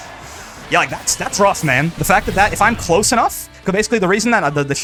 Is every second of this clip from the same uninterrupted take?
yes; 0 cuts

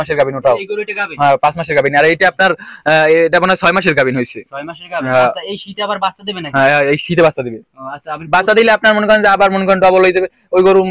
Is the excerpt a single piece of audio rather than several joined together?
yes; 0 cuts

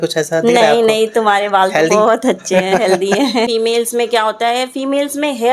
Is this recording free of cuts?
no; 1 cut; at 3.5 s

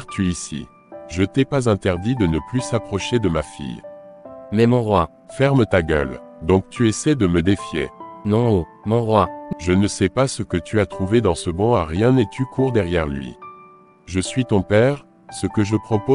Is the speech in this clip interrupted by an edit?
yes; 1 cut; at 9.4 s

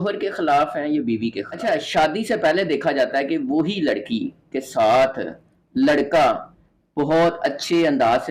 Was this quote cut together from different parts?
yes; 1 cut; at 1.5 s

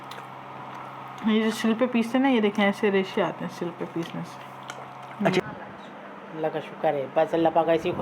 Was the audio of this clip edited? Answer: yes; 1 cut; at 5.4 s

